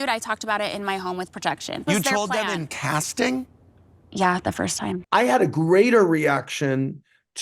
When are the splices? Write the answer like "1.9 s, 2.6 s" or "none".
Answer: 1.8 s, 5.0 s